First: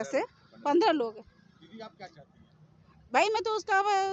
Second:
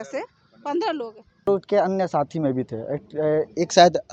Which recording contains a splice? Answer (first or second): second